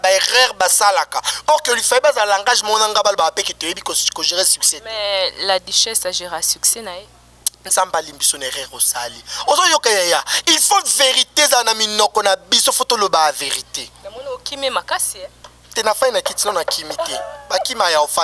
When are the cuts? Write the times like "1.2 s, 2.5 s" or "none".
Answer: none